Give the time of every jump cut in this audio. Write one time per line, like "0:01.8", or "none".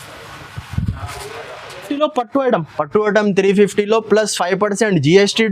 0:01.9